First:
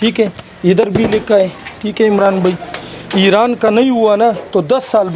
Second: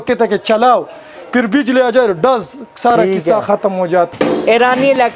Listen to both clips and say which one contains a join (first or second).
second